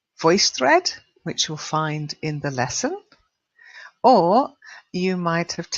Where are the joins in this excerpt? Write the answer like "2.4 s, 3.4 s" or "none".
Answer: 2.1 s